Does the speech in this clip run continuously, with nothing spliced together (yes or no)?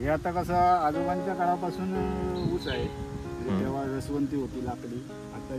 yes